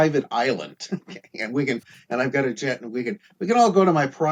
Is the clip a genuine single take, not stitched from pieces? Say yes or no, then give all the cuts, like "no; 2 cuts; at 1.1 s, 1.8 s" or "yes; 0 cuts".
yes; 0 cuts